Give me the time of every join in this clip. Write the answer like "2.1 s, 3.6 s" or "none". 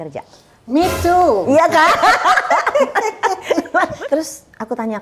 3.9 s